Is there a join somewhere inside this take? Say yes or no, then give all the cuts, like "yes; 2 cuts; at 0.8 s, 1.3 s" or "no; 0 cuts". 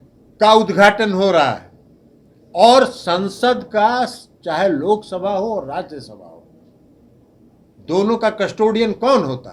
no; 0 cuts